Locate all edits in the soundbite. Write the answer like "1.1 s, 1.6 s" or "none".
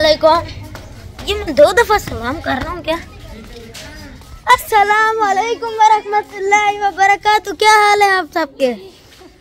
none